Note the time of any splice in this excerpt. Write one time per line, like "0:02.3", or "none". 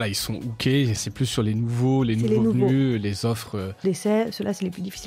0:01.0
0:03.8